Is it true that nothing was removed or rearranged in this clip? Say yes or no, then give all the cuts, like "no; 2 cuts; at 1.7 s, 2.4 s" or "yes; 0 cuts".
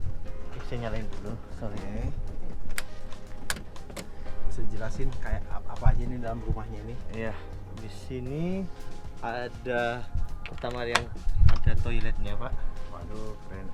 yes; 0 cuts